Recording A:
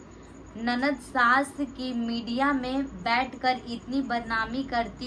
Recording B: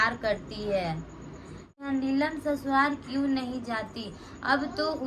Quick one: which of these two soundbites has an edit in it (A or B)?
B